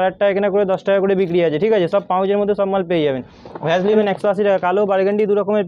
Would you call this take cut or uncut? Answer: cut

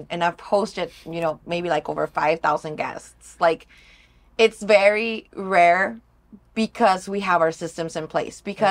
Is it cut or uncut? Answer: uncut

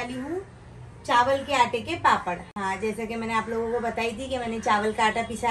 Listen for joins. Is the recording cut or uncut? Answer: uncut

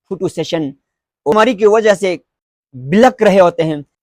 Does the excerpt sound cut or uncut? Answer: cut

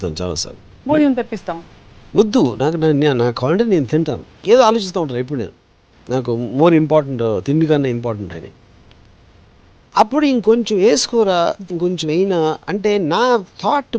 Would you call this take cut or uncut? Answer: cut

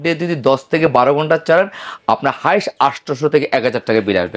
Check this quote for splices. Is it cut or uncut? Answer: uncut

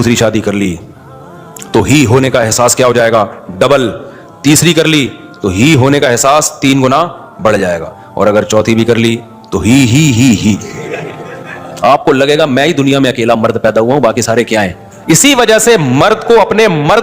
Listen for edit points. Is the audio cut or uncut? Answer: cut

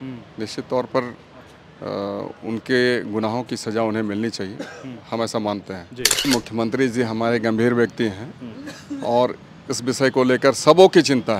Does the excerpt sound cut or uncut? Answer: cut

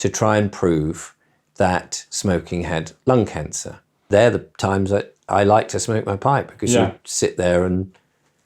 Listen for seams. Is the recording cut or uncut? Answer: cut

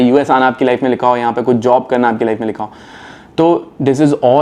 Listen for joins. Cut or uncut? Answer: uncut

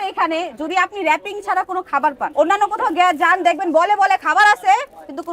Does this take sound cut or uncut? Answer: uncut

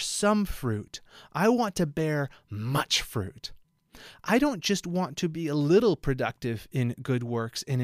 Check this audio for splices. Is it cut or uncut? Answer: uncut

